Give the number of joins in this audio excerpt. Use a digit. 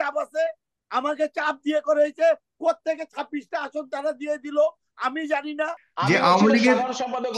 1